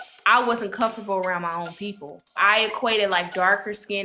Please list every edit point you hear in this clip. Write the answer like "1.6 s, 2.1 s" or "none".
2.4 s